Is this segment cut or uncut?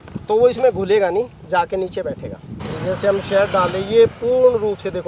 cut